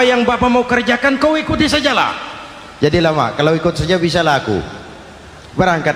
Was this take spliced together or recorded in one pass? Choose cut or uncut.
uncut